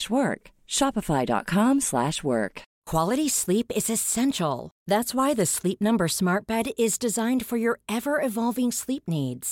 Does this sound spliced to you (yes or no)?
yes